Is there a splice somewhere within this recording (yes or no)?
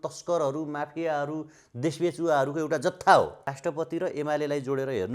yes